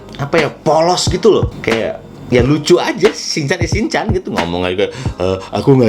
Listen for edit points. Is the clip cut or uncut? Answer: uncut